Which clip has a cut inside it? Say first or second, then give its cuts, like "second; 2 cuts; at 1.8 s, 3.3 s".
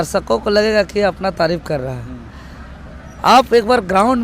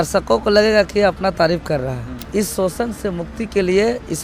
second; 1 cut; at 2.1 s